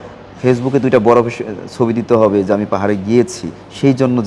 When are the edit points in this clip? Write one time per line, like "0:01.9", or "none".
none

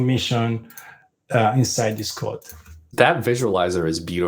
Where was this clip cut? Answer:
0:02.8

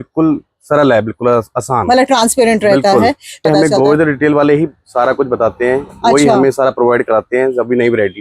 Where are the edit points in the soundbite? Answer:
0:03.4

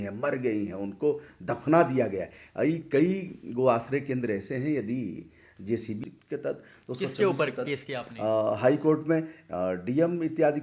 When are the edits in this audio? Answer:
0:06.1

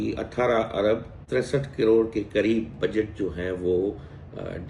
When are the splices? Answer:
0:01.2

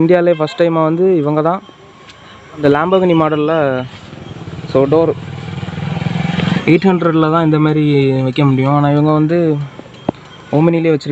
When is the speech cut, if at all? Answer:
0:02.6
0:06.6

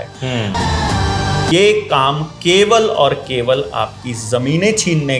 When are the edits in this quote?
0:01.0

